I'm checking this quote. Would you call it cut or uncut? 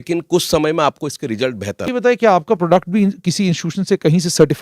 cut